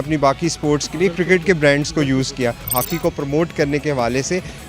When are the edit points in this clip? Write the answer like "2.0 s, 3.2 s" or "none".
2.7 s